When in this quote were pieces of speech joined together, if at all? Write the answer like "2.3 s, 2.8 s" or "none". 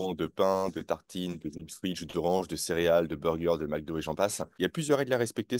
4.4 s